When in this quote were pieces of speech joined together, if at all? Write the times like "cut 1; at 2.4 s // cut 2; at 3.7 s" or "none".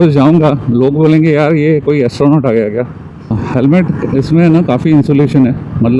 cut 1; at 3.3 s